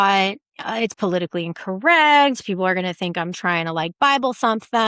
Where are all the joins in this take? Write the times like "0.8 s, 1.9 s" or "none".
none